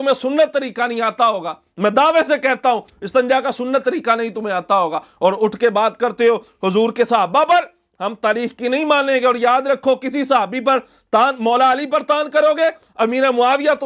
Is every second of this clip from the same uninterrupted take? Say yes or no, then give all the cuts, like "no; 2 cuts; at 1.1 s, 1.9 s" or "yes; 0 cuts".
yes; 0 cuts